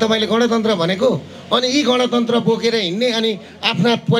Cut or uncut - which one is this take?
uncut